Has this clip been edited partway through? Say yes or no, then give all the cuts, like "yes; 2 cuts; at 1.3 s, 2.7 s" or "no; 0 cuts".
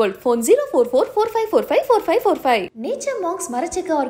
no; 0 cuts